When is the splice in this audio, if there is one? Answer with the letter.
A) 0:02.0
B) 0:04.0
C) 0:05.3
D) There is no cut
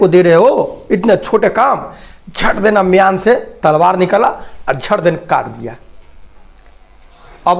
D